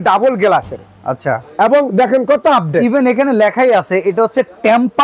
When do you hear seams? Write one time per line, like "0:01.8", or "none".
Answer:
none